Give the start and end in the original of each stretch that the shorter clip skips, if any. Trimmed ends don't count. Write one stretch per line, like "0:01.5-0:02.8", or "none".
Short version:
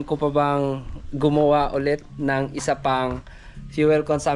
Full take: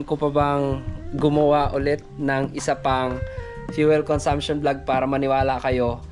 none